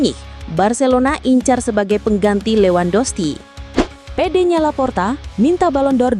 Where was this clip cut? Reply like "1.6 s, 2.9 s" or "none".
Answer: 4.0 s